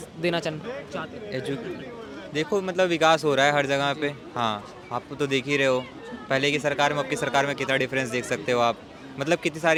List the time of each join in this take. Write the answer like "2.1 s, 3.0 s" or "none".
none